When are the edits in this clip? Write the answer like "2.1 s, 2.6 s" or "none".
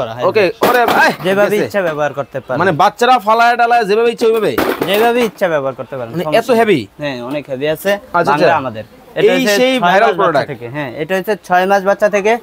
9.0 s